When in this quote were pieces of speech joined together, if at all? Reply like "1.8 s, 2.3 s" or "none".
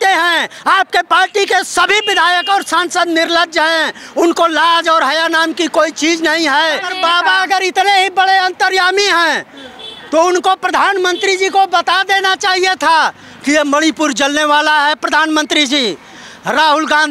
6.9 s